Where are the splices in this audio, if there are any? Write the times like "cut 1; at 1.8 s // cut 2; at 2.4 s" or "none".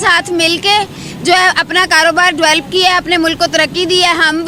none